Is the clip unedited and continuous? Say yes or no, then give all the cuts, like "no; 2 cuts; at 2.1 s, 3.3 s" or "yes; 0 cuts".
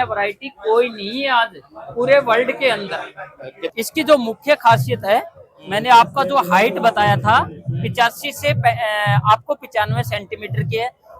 no; 1 cut; at 3.7 s